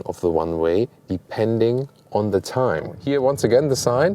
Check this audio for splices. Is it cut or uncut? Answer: cut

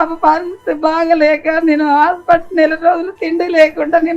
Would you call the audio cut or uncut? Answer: uncut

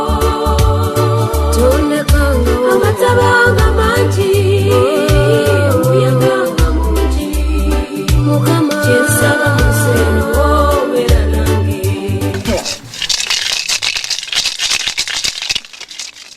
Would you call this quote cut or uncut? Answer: cut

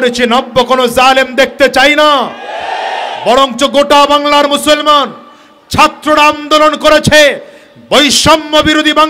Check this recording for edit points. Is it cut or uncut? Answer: uncut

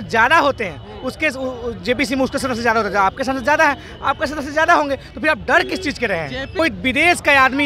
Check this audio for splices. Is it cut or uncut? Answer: cut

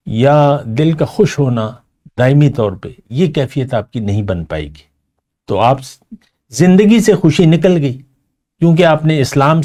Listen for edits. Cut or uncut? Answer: uncut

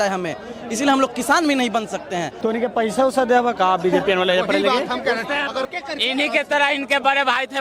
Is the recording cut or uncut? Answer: cut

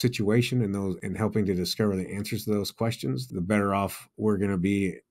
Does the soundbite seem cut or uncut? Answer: cut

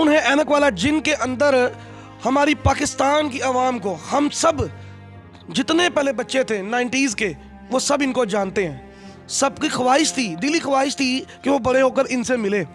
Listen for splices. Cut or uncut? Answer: uncut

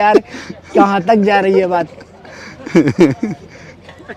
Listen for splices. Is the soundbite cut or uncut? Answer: uncut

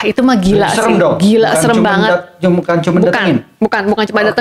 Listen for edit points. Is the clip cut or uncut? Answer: uncut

